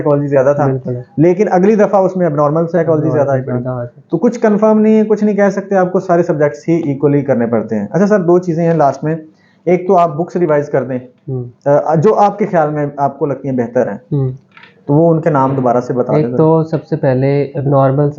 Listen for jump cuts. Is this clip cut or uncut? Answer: uncut